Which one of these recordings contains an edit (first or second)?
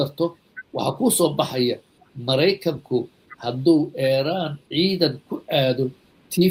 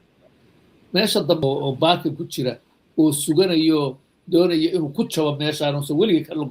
second